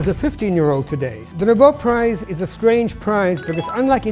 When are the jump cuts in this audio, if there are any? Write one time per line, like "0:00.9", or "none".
0:01.2
0:02.2